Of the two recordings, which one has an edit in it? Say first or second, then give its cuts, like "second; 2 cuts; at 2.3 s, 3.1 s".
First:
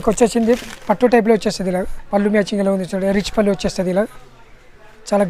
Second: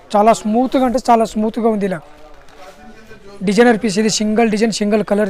first; 1 cut; at 2.0 s